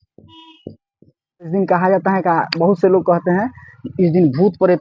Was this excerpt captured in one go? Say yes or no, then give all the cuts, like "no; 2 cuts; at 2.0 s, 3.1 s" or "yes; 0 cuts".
no; 1 cut; at 1.5 s